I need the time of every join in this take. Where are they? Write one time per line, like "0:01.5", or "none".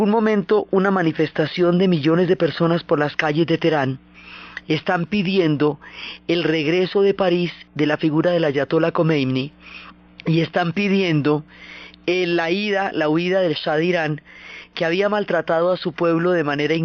0:12.1